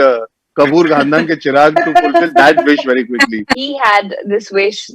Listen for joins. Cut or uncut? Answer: cut